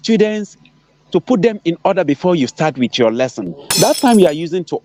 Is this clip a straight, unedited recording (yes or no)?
yes